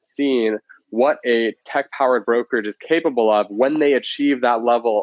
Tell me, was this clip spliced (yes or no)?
no